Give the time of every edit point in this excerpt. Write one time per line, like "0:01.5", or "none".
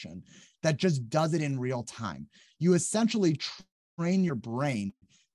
none